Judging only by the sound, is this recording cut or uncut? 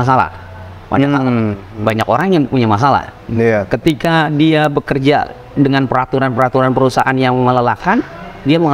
uncut